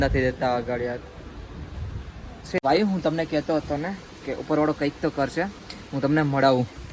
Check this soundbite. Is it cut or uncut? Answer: cut